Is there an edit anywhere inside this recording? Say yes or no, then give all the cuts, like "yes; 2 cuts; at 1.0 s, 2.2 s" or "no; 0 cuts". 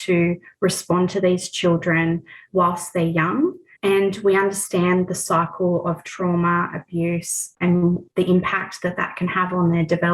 yes; 1 cut; at 2.3 s